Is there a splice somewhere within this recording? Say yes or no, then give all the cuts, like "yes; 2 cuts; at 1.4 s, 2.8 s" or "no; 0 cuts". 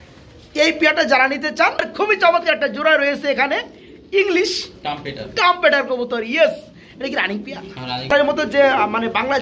yes; 2 cuts; at 1.9 s, 8.1 s